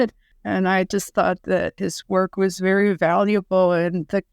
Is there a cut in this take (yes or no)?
yes